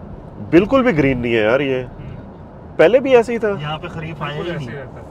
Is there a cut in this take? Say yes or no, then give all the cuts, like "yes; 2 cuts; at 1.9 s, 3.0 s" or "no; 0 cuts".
no; 0 cuts